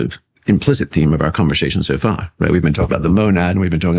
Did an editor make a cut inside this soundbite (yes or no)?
no